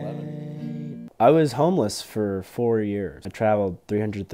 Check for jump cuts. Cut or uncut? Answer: cut